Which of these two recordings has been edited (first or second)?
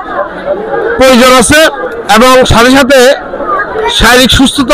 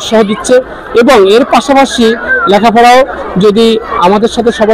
first